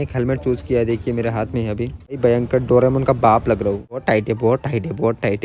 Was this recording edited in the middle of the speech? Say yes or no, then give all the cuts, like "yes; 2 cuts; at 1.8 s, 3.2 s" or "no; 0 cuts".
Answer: yes; 2 cuts; at 2.2 s, 4.0 s